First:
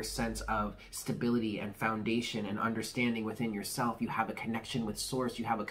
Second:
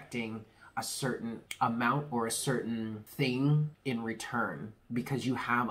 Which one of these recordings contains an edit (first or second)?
second